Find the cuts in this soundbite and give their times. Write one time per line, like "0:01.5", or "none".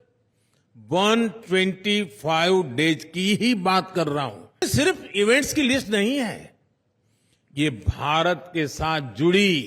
0:04.6